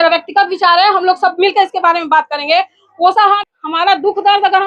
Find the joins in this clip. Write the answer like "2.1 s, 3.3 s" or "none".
3.4 s